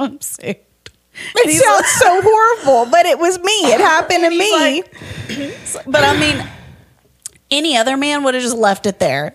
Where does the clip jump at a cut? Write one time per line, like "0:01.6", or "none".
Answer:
none

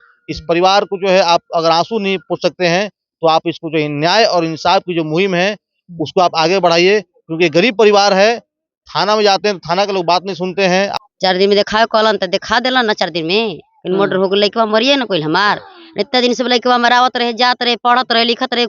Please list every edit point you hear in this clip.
0:10.9

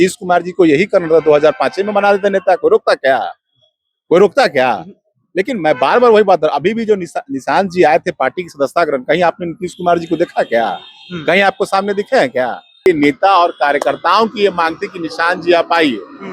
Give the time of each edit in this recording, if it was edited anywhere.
0:12.9

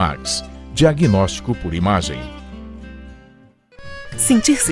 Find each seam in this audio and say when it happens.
0:03.6

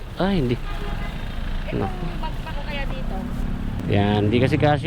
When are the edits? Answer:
0:03.8

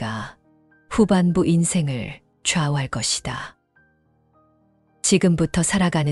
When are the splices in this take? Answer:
none

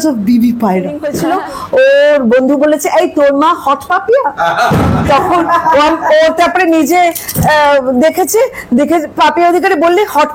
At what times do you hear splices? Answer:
0:01.1

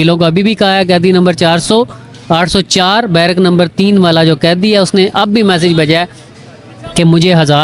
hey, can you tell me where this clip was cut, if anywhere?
0:05.6

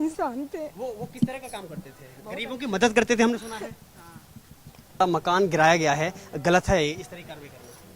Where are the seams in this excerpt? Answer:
0:05.0

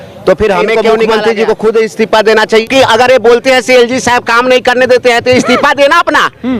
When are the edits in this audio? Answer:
0:00.9
0:02.7

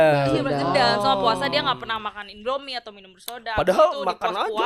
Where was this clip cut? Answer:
none

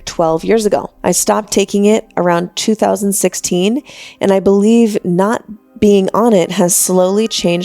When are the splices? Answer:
0:00.9

